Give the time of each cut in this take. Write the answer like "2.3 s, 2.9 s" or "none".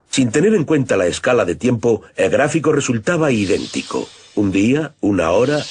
4.4 s